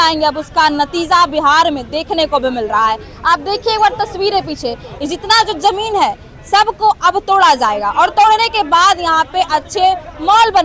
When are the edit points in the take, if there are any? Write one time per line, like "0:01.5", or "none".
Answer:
none